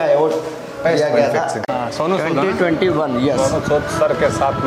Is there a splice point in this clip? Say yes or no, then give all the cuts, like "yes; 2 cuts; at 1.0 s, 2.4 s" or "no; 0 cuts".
yes; 1 cut; at 1.7 s